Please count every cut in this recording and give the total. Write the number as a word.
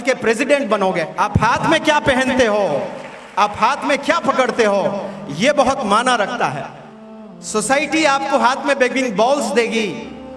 one